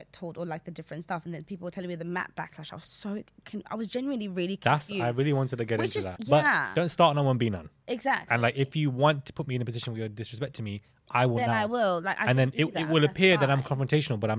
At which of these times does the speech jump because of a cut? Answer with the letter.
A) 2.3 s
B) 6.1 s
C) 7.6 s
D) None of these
B